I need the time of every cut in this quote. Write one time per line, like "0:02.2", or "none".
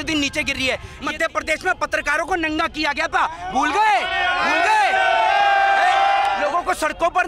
0:01.0
0:06.4